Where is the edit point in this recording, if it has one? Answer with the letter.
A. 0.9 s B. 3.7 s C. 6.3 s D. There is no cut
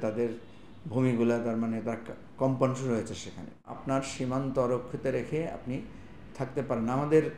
B